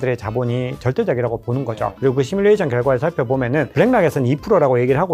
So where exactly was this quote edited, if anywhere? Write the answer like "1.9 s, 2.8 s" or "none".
1.9 s